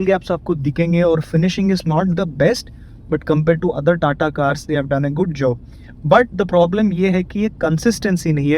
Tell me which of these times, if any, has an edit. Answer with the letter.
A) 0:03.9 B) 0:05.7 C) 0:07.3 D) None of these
D